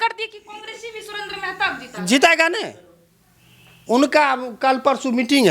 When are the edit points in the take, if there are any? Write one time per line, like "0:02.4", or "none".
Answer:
none